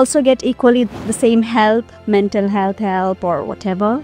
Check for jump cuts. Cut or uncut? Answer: uncut